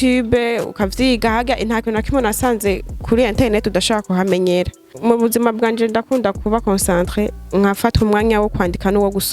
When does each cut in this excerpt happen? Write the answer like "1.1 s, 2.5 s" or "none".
4.9 s